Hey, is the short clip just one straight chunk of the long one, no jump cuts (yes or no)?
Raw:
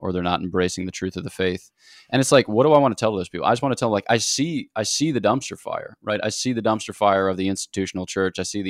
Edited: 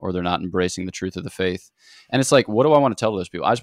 yes